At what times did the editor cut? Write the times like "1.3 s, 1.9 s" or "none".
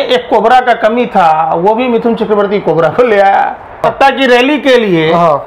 3.8 s